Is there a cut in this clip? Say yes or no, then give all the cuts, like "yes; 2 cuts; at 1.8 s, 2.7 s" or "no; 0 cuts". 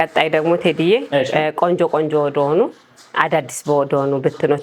no; 0 cuts